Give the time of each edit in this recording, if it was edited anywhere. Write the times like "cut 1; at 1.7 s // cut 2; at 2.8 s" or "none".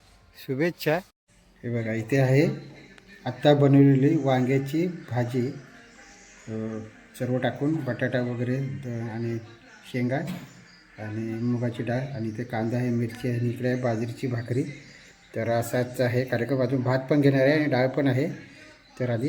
cut 1; at 1.1 s

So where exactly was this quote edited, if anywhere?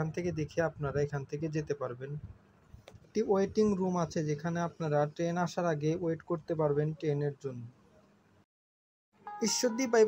cut 1; at 3.1 s

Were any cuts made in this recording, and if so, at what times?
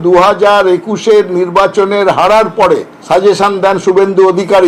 none

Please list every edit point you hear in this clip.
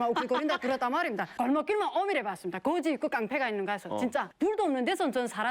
cut 1; at 1.3 s // cut 2; at 4.3 s

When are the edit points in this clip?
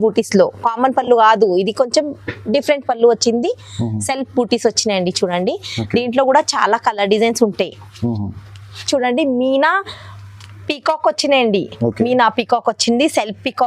cut 1; at 8.8 s

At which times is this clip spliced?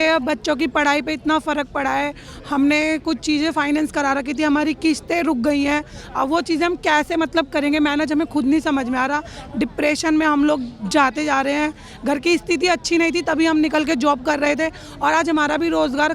none

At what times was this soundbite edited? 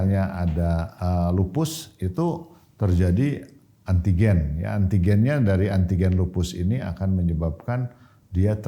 cut 1; at 0.9 s

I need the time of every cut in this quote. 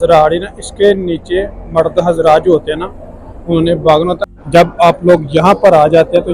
cut 1; at 4.3 s

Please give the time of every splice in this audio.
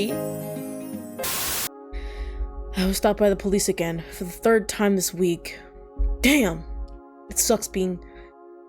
cut 1; at 1.2 s

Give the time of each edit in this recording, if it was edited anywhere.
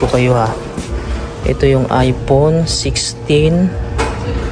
none

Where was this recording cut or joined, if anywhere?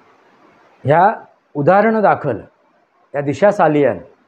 none

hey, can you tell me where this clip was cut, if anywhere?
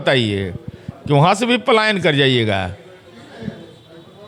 none

